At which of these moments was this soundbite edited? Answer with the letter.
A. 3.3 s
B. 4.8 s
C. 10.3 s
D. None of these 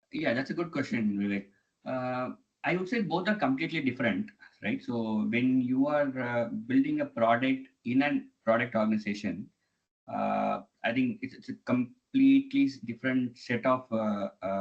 D